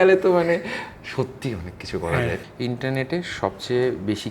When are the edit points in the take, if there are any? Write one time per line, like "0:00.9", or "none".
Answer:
0:02.4